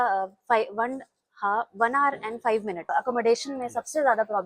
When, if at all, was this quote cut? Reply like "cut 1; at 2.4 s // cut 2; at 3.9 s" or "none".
cut 1; at 2.9 s